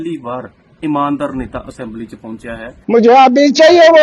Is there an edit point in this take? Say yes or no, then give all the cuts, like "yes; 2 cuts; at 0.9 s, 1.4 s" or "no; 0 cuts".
yes; 1 cut; at 2.8 s